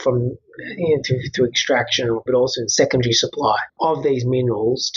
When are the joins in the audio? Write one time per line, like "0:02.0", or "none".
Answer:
0:02.2

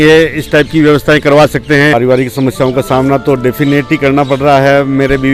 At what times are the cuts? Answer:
0:01.9

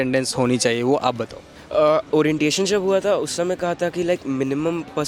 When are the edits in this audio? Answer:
none

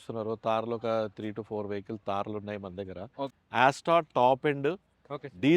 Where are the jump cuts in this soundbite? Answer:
0:03.4

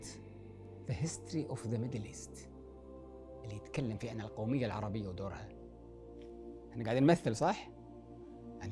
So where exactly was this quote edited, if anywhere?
0:02.1
0:03.5

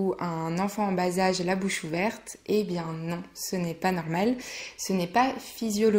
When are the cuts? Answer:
none

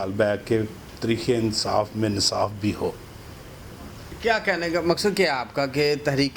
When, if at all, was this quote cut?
none

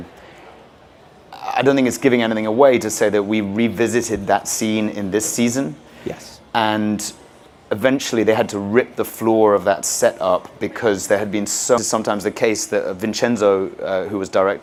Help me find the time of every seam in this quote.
none

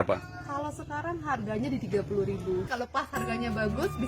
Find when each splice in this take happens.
0:02.8

